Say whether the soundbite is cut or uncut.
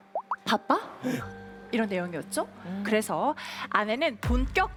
uncut